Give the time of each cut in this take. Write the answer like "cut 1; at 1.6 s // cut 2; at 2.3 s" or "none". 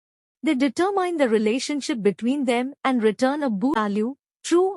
cut 1; at 3.7 s